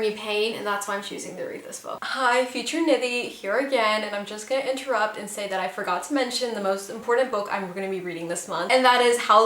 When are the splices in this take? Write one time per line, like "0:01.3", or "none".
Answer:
none